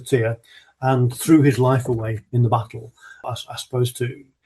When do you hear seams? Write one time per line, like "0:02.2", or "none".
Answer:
0:03.2

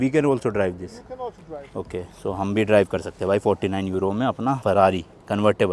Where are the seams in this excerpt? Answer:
none

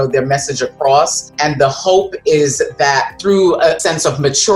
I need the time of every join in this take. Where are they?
0:01.3
0:03.8

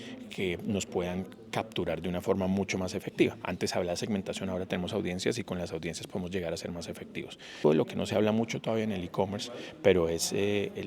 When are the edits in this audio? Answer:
0:07.6

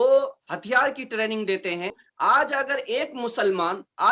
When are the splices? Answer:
0:02.0

